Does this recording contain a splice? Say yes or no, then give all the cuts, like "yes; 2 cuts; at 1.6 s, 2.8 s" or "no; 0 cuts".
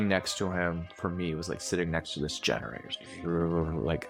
no; 0 cuts